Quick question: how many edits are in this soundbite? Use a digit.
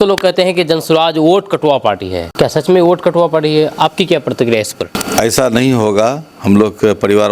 2